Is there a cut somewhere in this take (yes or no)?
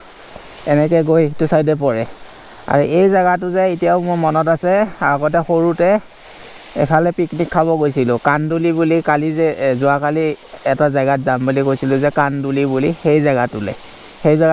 no